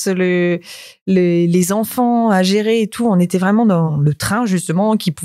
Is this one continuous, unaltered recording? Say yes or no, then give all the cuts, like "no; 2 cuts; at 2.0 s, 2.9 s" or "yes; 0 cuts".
no; 1 cut; at 3.9 s